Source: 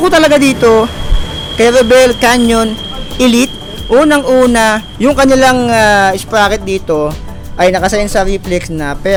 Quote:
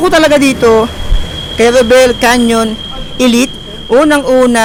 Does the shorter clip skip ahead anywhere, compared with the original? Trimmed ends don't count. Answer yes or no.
no